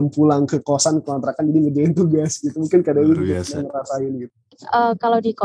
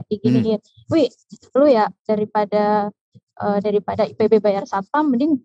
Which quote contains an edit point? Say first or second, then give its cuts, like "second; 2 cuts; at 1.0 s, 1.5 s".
first; 1 cut; at 4.3 s